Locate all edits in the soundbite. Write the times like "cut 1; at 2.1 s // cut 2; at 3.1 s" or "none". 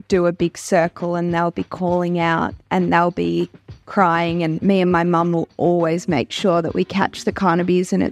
cut 1; at 4.6 s